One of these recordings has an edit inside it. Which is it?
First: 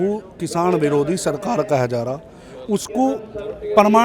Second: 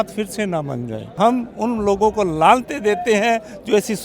second; 1 cut; at 1.2 s

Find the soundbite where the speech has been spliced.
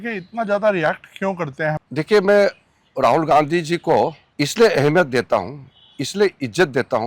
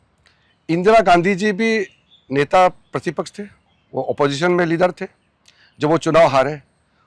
first; 2 cuts; at 1.8 s, 4.2 s

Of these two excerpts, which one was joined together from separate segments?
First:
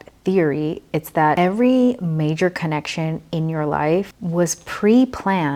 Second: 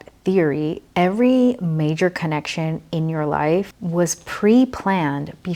second; 1 cut; at 0.9 s

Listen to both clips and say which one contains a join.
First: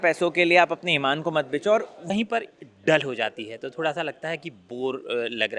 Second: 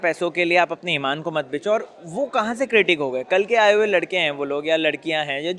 first; 1 cut; at 2.1 s

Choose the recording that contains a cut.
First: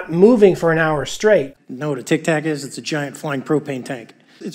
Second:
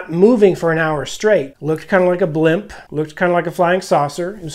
first; 1 cut; at 1.5 s

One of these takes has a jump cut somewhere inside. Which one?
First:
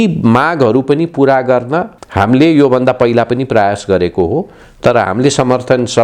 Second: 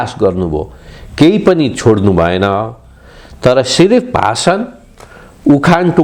first; 1 cut; at 2.0 s

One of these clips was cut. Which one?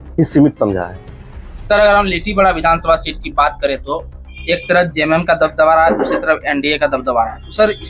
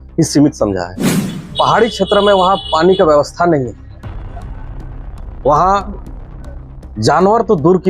second; 1 cut; at 1.4 s

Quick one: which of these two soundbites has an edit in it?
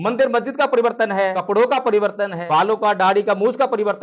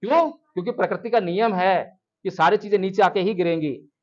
first; 2 cuts; at 1.4 s, 2.4 s

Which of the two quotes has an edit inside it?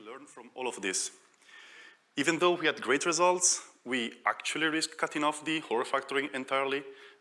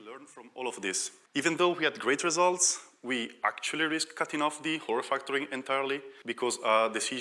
second; 2 cuts; at 1.1 s, 6.2 s

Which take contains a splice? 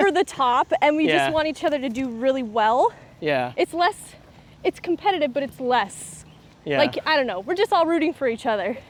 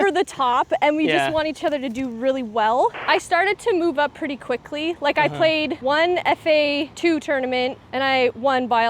second; 4 cuts; at 3.0 s, 5.8 s, 6.9 s, 7.8 s

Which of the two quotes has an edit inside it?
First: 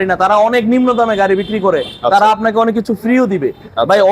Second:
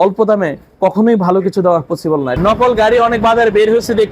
second; 1 cut; at 2.3 s

